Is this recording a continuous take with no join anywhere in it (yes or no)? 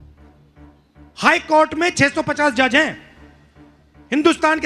no